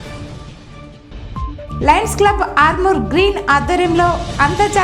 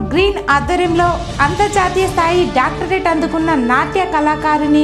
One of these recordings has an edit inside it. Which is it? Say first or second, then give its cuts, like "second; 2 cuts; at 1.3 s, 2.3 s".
first; 1 cut; at 1.0 s